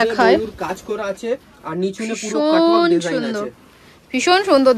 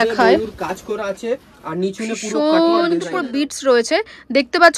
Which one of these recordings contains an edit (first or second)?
second